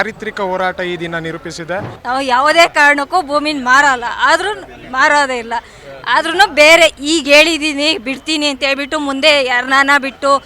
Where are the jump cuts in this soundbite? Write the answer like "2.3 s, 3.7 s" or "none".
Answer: 1.9 s